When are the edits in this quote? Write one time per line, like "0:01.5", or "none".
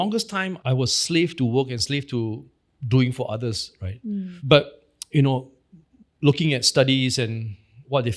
none